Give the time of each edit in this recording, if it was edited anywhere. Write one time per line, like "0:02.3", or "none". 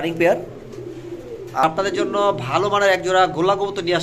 0:01.6